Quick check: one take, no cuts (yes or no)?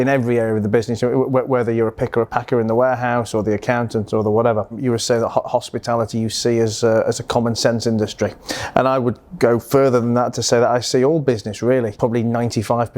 no